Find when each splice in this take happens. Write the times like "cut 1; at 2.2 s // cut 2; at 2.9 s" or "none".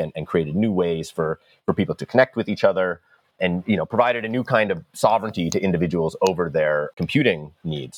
cut 1; at 3.3 s // cut 2; at 6.9 s